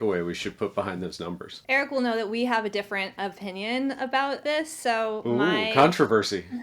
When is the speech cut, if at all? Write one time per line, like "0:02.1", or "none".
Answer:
0:01.5
0:04.4